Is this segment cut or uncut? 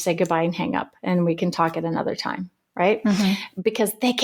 uncut